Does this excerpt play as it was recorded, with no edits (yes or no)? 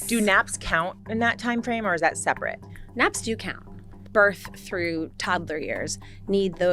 no